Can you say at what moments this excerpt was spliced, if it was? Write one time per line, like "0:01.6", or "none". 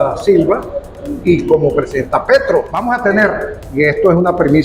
0:02.7